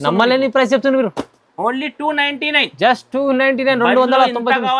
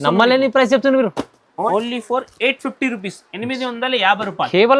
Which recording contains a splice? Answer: second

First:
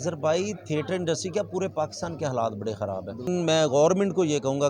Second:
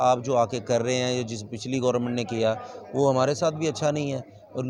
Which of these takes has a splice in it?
first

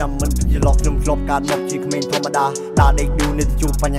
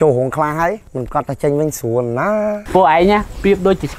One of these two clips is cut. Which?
second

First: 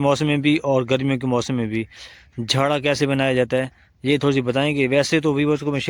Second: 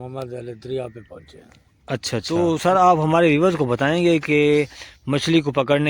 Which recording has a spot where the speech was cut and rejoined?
second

